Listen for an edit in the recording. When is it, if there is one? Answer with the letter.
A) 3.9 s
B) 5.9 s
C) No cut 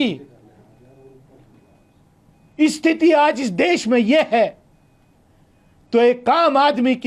C